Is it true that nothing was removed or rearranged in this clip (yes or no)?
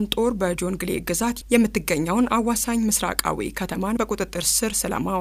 yes